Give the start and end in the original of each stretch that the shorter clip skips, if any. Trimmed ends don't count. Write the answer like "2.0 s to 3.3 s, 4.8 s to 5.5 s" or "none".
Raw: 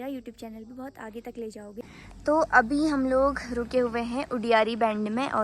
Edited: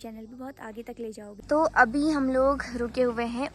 1.7 s to 2.1 s